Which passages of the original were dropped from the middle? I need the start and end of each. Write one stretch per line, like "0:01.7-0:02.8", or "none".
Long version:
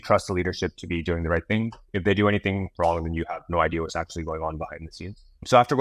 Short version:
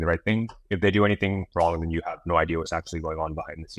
none